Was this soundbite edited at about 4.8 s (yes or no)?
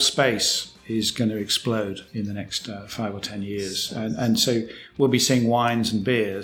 no